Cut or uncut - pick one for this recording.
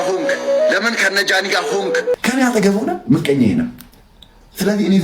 cut